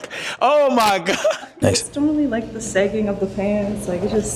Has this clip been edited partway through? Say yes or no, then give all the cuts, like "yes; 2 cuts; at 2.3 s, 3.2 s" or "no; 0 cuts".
yes; 1 cut; at 1.5 s